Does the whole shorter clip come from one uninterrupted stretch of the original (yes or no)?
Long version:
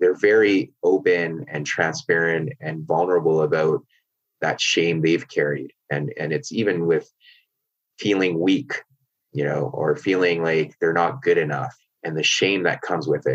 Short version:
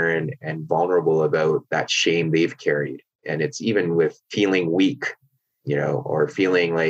no